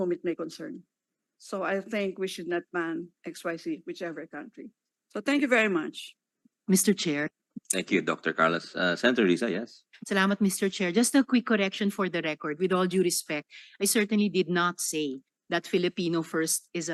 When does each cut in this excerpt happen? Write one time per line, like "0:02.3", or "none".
none